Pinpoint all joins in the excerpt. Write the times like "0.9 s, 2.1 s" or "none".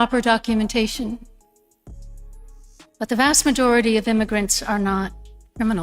1.2 s, 2.7 s